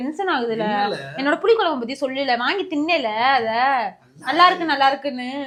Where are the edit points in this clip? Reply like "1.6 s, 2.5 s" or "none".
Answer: none